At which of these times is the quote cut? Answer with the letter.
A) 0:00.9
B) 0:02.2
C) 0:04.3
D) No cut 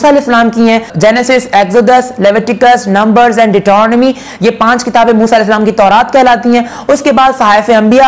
A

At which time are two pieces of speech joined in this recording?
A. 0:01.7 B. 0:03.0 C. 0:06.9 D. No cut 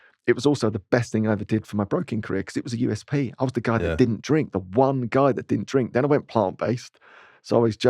D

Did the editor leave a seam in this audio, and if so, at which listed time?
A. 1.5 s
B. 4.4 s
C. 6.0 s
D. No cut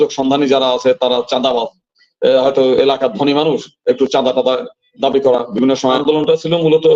C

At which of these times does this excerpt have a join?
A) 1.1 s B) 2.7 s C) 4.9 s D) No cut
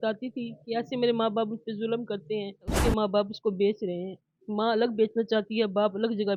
B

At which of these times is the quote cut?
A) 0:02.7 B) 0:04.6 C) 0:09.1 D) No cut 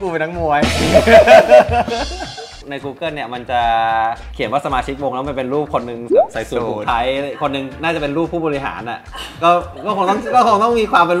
A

